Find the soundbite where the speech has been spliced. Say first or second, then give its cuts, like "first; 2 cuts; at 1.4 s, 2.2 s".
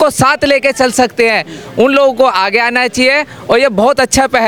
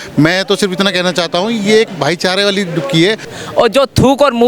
second; 1 cut; at 3.3 s